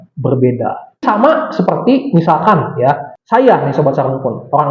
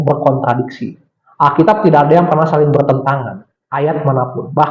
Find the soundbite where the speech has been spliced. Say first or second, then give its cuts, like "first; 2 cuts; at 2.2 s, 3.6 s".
first; 1 cut; at 1.0 s